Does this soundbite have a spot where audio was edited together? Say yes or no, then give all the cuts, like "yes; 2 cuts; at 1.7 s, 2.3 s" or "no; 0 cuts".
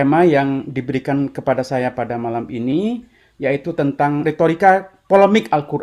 yes; 1 cut; at 4.2 s